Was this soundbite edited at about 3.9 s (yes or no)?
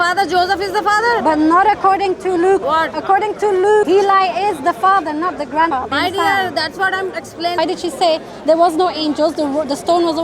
yes